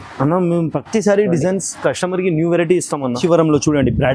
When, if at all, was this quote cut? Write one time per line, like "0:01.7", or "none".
0:03.2